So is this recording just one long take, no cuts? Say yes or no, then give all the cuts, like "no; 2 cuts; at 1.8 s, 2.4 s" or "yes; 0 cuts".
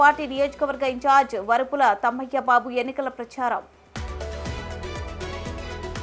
yes; 0 cuts